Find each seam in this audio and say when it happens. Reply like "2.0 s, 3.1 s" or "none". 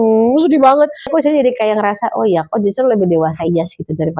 1.1 s